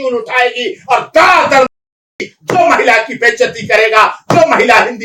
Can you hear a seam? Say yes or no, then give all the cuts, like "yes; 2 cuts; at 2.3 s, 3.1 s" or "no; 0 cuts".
no; 0 cuts